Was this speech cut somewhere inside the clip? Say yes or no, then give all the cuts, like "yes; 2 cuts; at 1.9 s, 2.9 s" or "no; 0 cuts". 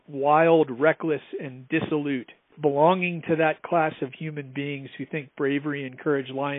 yes; 1 cut; at 2.6 s